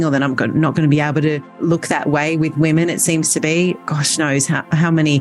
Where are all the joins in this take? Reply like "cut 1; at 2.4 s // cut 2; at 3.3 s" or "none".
cut 1; at 1.6 s